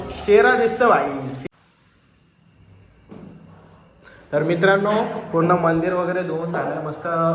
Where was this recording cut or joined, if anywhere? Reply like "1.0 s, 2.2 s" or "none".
1.4 s